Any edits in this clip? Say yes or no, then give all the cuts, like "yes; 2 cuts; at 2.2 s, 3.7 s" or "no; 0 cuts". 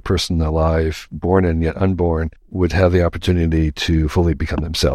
yes; 1 cut; at 2.4 s